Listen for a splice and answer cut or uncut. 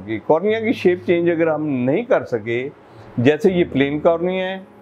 uncut